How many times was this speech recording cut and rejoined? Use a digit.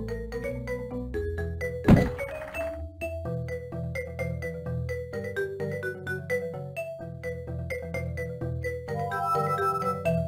0